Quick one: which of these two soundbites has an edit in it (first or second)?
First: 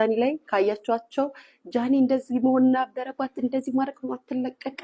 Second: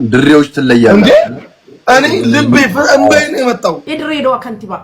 second